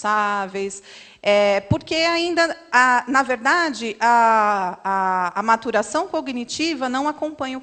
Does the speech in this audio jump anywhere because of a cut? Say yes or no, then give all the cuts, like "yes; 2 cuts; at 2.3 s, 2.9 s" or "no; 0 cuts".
no; 0 cuts